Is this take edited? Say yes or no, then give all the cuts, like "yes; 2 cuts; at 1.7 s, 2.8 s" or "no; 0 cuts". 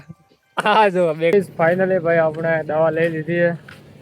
yes; 1 cut; at 1.3 s